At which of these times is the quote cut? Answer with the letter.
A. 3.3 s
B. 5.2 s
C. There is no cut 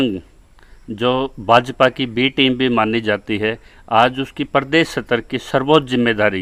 C